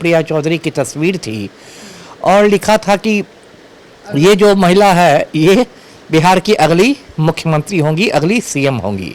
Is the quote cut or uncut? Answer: uncut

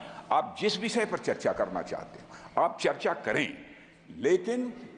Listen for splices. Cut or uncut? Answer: uncut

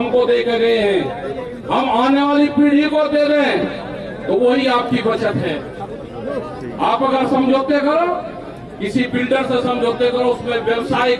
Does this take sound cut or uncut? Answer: uncut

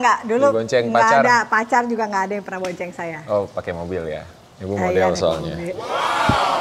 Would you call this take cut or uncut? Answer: uncut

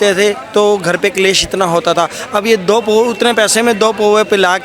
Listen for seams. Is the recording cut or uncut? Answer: uncut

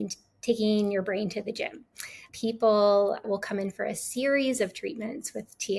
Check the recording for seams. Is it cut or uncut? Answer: cut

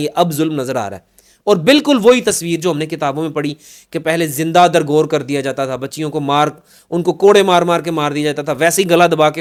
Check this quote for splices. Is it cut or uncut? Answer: uncut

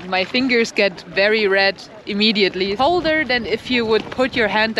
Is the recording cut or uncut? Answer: cut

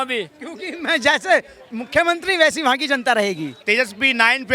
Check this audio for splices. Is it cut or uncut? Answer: cut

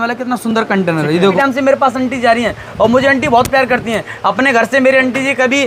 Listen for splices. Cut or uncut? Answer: cut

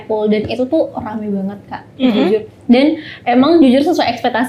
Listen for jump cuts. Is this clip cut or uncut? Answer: uncut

